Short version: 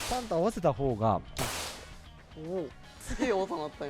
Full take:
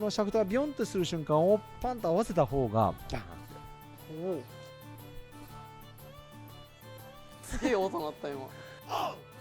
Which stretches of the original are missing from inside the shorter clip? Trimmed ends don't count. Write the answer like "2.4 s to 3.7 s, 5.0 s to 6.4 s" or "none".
4.6 s to 7.3 s